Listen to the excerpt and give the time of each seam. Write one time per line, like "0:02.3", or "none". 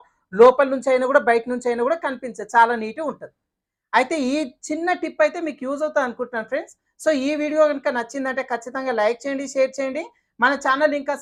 none